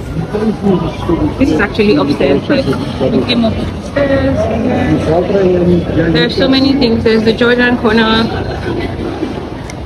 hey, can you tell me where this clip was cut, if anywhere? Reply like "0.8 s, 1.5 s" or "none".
none